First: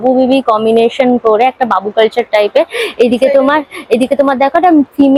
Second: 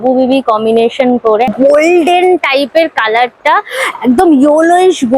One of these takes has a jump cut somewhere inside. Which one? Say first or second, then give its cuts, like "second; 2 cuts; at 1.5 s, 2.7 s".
second; 1 cut; at 1.5 s